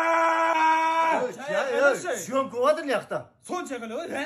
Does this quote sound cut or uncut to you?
uncut